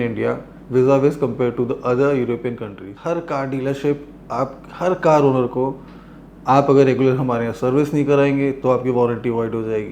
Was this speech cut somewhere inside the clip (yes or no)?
yes